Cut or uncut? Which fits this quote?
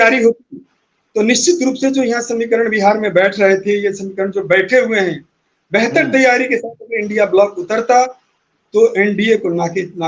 uncut